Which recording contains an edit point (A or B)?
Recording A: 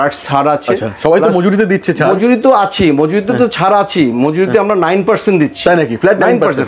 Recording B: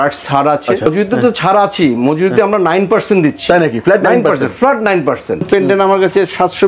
B